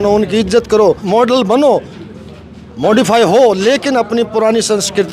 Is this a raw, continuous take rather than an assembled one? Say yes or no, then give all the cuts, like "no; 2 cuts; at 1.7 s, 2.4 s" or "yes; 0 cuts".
no; 1 cut; at 1.0 s